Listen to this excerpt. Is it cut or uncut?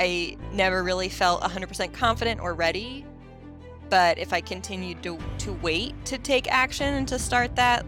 uncut